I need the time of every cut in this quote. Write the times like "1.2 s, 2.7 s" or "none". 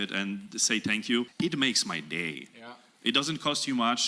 1.3 s